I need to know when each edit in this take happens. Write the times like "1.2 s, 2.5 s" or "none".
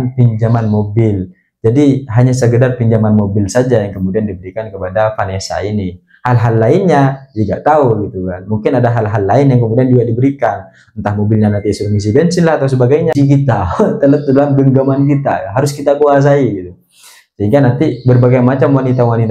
13.1 s